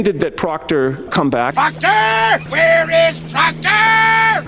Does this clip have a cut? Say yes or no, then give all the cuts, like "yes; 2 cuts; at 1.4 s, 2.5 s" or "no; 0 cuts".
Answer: yes; 1 cut; at 2.5 s